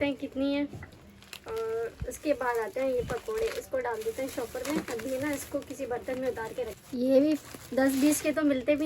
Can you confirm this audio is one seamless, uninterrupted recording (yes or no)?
no